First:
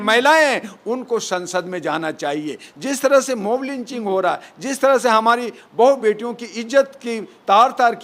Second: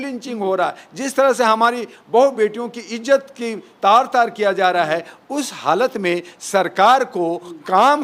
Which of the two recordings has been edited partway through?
first; 1 cut; at 2.6 s

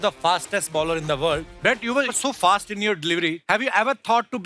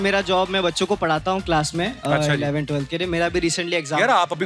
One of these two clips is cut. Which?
first; 2 cuts; at 1.5 s, 3.4 s

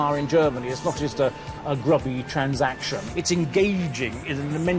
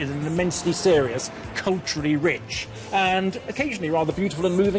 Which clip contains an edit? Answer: first; 1 cut; at 3.0 s

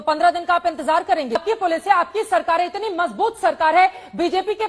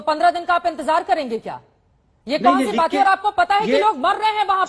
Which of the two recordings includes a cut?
first; 1 cut; at 1.4 s

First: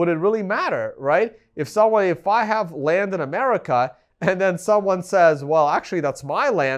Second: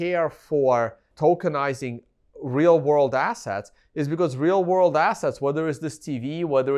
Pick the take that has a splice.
second; 1 cut; at 1.0 s

